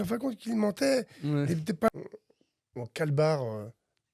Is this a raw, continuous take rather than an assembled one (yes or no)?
no